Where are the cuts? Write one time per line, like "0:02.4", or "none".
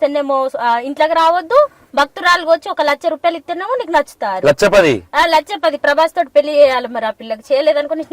none